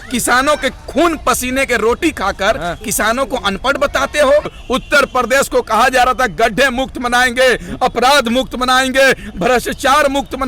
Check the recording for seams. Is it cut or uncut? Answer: cut